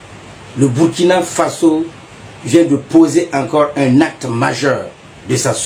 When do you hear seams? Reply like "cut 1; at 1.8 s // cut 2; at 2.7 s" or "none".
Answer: none